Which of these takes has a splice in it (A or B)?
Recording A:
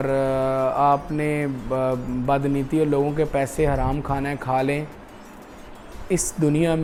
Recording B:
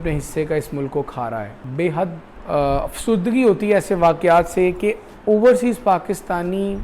B